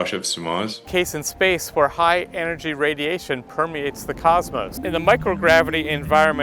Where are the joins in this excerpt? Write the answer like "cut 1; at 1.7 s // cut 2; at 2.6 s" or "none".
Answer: cut 1; at 0.9 s // cut 2; at 4.7 s